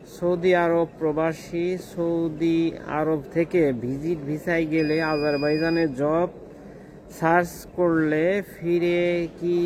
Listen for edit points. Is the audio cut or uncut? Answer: uncut